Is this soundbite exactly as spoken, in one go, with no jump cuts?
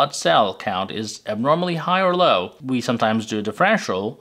yes; 0 cuts

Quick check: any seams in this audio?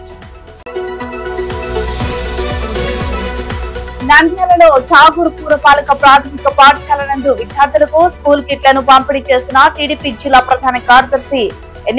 no; 0 cuts

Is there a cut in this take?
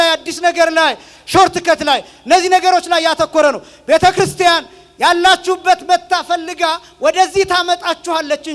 no; 0 cuts

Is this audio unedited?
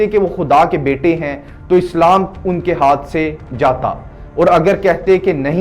yes; 0 cuts

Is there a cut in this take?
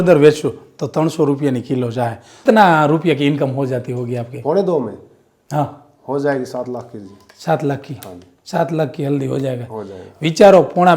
yes; 1 cut; at 2.4 s

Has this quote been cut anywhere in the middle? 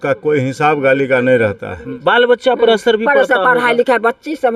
yes; 1 cut; at 1.9 s

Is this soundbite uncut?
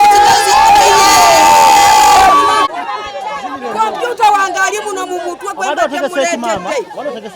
no; 1 cut; at 2.7 s

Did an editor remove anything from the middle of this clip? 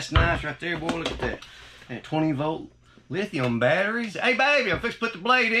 yes; 1 cut; at 4.1 s

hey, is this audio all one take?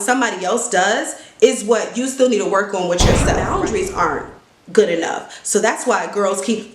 no; 1 cut; at 3.4 s

